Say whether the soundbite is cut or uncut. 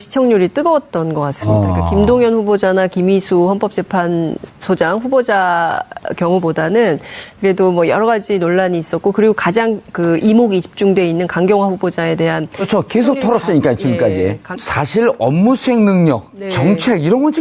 uncut